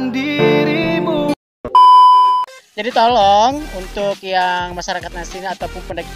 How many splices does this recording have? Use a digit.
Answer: 2